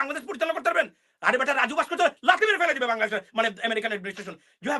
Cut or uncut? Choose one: uncut